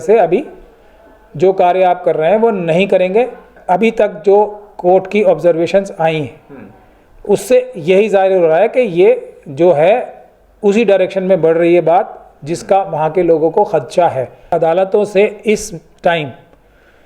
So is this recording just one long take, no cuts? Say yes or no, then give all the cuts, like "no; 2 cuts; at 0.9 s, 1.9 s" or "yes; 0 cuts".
no; 2 cuts; at 3.5 s, 14.5 s